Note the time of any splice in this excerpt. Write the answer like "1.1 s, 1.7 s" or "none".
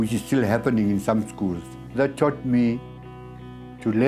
2.0 s